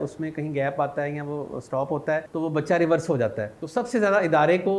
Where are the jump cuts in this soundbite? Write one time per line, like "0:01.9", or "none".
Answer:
0:02.3
0:03.5

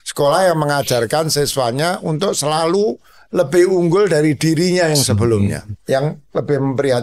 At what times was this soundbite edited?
0:05.7

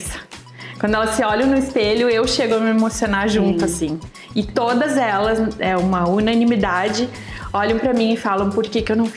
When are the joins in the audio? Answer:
none

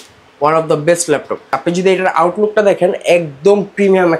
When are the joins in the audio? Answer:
0:01.5

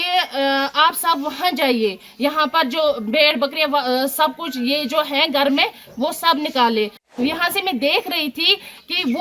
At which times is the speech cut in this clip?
0:07.0

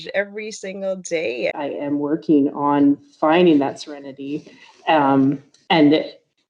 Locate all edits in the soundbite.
0:01.5

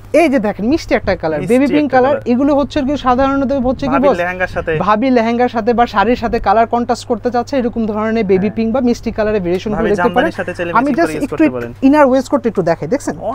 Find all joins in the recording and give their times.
none

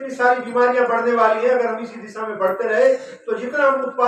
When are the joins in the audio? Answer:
none

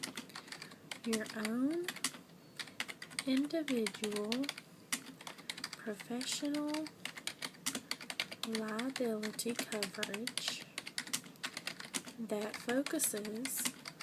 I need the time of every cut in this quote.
0:01.2

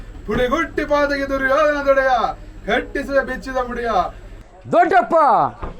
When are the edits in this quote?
0:04.5

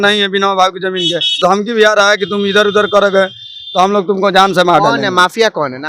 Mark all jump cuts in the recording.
0:01.4

